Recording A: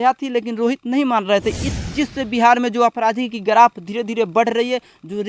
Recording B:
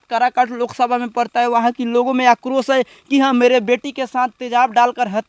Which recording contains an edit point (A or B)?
A